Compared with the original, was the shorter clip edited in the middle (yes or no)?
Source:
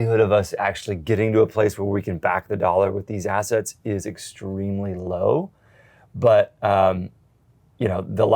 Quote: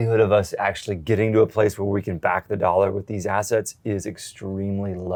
no